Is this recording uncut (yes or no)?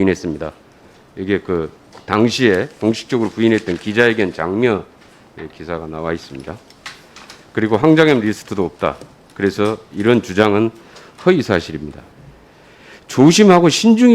no